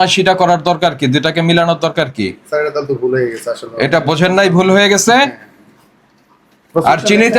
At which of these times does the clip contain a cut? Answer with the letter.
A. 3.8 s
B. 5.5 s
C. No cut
C